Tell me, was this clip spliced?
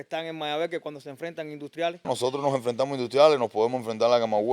yes; 1 cut; at 2.1 s

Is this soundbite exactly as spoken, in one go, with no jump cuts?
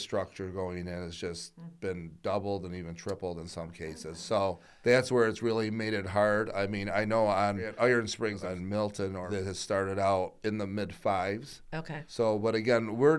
yes; 0 cuts

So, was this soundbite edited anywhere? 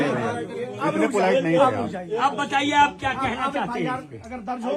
no; 0 cuts

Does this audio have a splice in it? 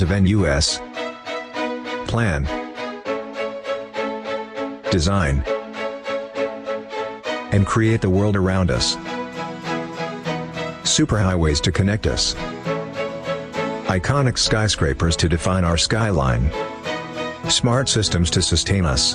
yes; 1 cut; at 3.9 s

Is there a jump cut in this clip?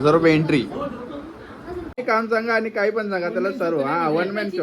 yes; 1 cut; at 2.0 s

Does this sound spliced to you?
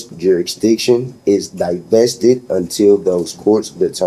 no; 0 cuts

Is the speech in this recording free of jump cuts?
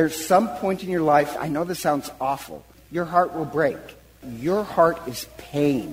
no; 3 cuts; at 1.4 s, 2.7 s, 4.3 s

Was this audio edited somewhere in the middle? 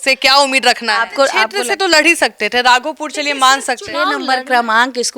yes; 2 cuts; at 1.5 s, 4.2 s

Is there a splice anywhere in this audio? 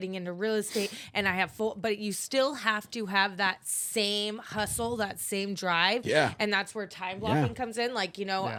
no; 0 cuts

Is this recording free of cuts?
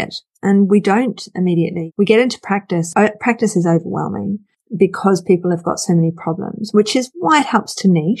yes; 0 cuts

